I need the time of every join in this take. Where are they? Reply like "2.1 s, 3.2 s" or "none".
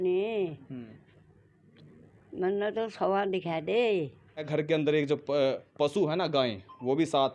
4.5 s